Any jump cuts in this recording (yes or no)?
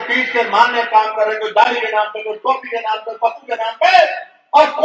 no